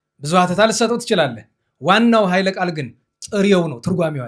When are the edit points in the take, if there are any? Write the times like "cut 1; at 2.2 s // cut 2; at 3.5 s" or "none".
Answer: none